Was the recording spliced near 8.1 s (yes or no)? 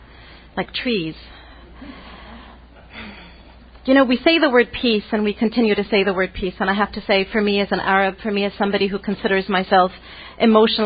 no